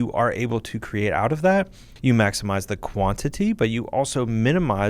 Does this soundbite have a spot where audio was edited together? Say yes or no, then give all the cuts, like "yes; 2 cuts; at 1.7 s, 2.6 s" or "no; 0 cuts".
yes; 1 cut; at 1.8 s